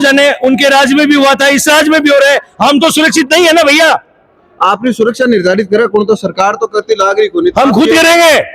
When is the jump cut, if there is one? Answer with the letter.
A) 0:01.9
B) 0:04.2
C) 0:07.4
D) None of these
D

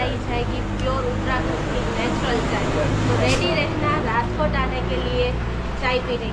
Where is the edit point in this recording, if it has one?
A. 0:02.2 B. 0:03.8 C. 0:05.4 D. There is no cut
D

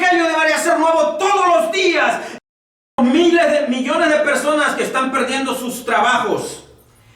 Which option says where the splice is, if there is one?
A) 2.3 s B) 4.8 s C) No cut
A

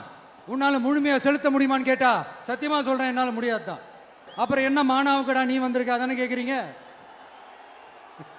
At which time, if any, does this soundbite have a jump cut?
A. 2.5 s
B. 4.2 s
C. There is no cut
B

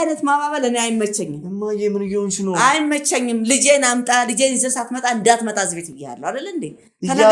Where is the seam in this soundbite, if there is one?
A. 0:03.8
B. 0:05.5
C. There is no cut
C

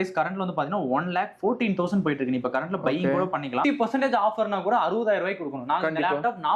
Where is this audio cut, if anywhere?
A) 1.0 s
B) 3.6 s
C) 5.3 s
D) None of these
B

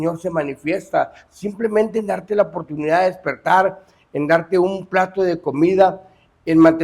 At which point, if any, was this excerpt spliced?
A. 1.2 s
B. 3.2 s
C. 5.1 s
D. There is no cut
D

